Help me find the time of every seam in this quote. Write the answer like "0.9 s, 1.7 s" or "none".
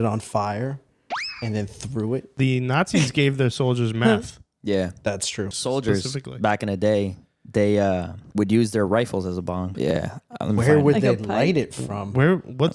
2.3 s, 5.5 s, 8.2 s, 9.7 s